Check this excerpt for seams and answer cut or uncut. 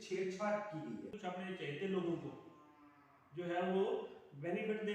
cut